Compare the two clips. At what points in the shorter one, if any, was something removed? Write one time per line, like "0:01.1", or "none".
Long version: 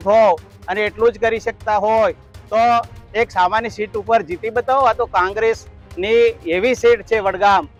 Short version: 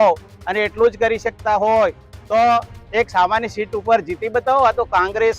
none